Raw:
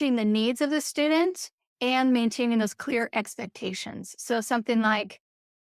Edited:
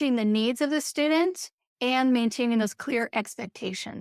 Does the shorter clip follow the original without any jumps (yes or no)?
yes